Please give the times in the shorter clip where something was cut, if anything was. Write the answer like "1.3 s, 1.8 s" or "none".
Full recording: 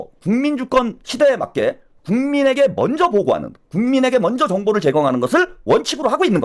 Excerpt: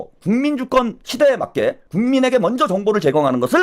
1.8 s